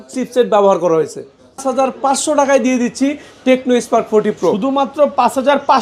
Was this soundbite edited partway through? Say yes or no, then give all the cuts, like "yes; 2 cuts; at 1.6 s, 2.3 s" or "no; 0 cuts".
yes; 1 cut; at 1.6 s